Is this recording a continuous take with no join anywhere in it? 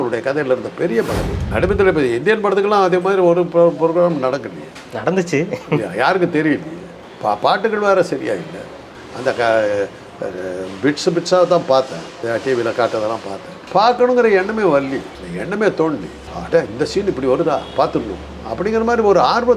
no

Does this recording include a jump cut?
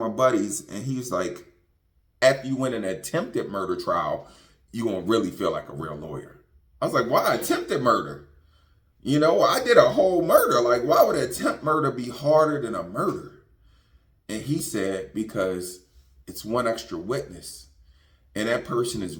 yes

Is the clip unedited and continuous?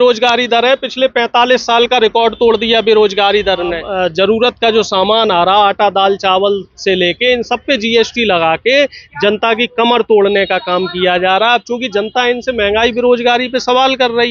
no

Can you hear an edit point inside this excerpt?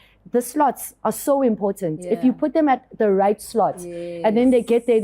no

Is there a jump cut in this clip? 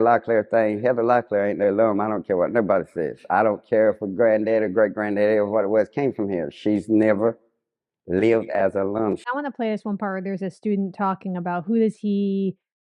yes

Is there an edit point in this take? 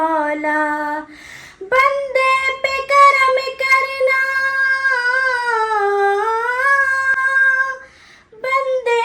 no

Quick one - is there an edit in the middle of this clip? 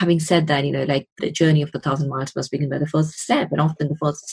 yes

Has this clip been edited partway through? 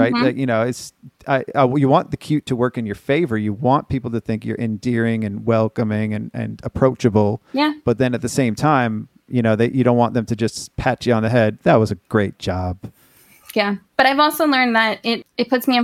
no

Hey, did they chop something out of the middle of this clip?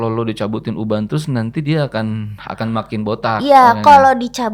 no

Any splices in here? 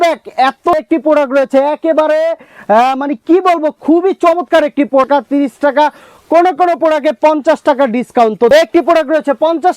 yes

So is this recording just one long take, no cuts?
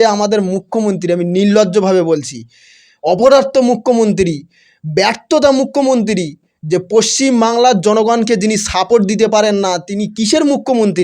yes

